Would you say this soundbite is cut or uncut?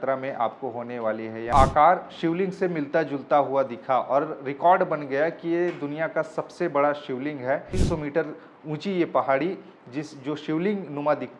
cut